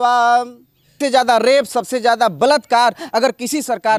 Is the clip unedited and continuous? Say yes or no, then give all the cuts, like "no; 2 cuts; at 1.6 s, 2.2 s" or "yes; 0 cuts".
no; 1 cut; at 1.0 s